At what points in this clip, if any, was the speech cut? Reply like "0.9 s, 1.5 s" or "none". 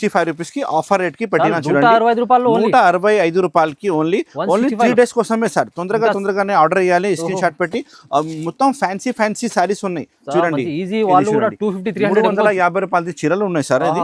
none